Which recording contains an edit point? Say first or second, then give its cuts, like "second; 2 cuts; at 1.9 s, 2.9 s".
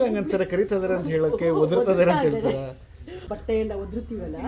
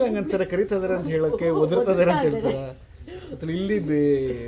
first; 1 cut; at 3.3 s